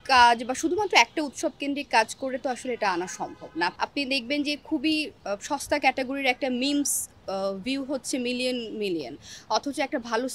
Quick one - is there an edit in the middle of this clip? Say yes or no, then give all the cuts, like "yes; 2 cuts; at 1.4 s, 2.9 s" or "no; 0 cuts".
yes; 1 cut; at 3.7 s